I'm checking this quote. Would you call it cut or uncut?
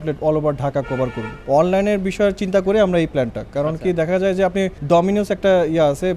cut